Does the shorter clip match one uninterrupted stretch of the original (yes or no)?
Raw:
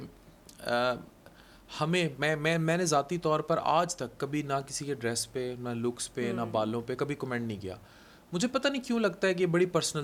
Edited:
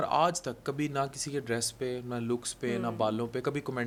yes